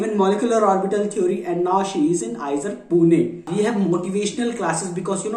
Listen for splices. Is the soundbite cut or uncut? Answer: cut